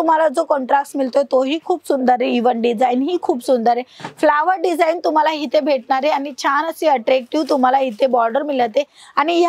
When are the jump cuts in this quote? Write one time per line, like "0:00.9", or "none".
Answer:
none

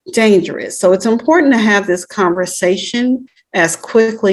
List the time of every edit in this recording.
0:03.4

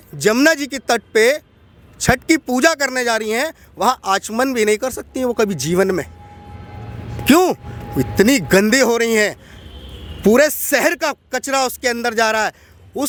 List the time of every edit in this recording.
none

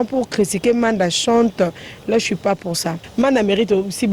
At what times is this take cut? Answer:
0:03.0

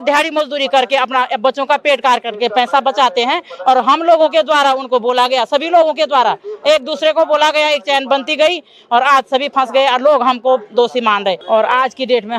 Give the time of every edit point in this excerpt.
0:11.4

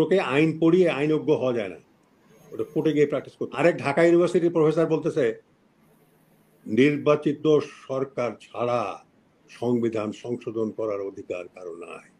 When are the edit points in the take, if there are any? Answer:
0:03.4

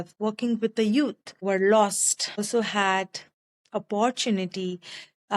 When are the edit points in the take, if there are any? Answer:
0:01.4
0:02.4

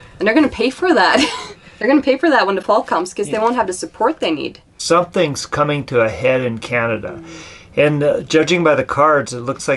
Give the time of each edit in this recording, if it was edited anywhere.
0:04.7

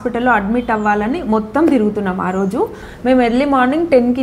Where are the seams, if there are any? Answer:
0:02.9

